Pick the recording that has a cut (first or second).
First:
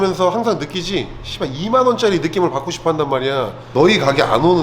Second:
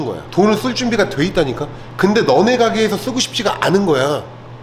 first